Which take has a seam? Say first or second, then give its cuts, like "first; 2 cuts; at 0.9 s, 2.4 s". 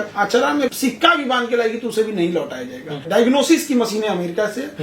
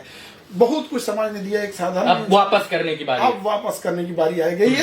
first; 2 cuts; at 0.7 s, 3.0 s